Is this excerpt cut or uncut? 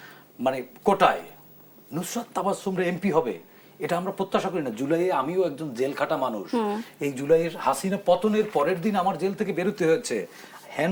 uncut